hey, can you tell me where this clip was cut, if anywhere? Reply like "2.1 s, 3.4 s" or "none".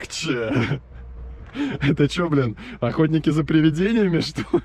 none